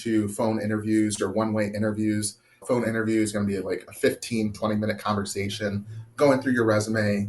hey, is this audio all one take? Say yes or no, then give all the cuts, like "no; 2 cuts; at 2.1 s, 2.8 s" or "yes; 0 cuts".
no; 1 cut; at 2.6 s